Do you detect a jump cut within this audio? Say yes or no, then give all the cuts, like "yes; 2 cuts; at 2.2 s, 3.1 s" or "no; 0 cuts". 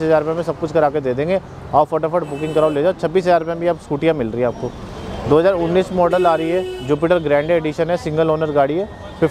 no; 0 cuts